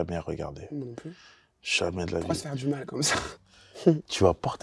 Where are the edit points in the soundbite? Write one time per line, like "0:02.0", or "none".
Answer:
0:03.3